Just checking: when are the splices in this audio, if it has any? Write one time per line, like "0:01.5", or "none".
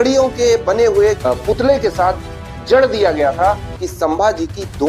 0:03.7